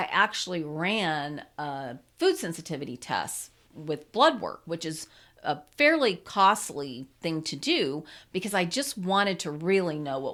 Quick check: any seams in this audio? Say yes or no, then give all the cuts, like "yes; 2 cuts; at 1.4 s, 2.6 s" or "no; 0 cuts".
no; 0 cuts